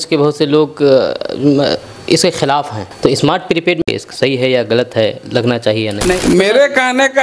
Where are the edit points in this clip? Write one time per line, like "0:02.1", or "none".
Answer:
0:02.8
0:06.2